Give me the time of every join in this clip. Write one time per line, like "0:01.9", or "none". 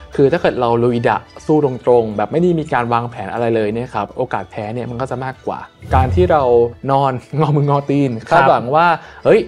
0:05.7
0:06.8